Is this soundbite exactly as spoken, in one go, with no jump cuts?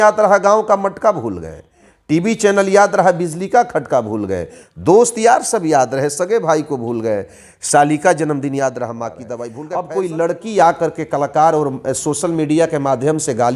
no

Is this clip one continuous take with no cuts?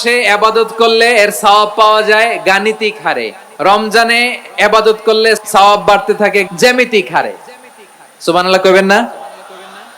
no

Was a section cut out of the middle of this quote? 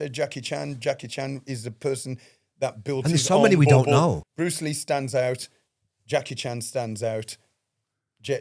yes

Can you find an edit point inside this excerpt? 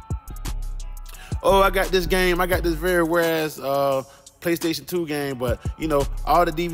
yes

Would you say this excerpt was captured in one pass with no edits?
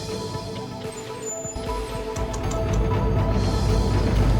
yes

